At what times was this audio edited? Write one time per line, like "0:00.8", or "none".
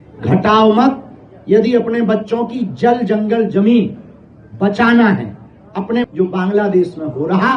0:06.0